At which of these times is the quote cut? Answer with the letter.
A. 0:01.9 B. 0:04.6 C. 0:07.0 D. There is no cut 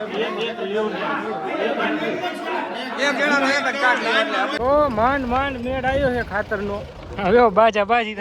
D